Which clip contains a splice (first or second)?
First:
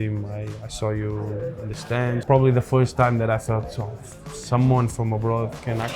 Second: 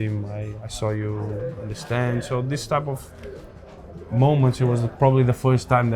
first